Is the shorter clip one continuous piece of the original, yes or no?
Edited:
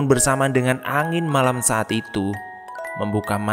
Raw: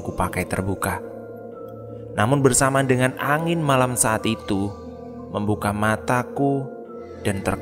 yes